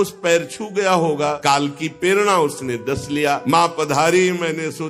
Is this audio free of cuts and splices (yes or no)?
no